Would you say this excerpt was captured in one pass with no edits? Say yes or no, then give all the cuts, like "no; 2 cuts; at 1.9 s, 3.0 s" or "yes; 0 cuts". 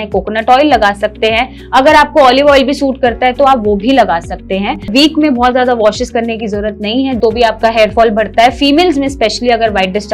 no; 2 cuts; at 4.9 s, 7.2 s